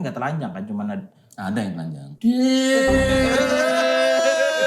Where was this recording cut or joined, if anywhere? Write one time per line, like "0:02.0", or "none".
0:02.0